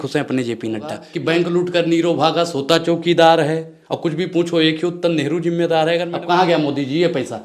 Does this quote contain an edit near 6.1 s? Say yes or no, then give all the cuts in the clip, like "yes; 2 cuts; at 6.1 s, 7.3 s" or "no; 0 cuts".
yes; 2 cuts; at 1.1 s, 6.1 s